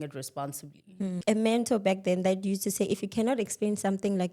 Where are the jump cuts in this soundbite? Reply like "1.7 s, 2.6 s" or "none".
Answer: 1.2 s